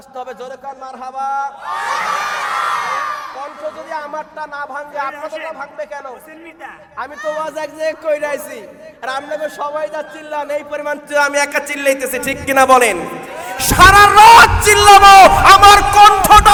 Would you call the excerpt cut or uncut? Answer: uncut